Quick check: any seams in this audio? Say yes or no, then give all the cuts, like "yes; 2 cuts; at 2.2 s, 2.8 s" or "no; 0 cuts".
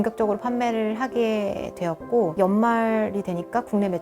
yes; 1 cut; at 2.3 s